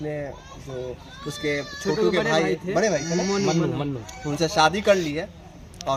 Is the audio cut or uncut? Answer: uncut